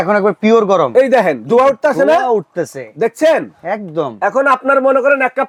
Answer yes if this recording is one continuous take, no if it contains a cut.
yes